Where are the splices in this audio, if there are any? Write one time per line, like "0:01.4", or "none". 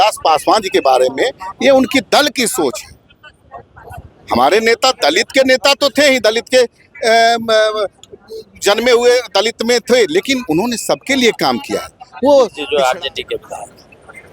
0:12.6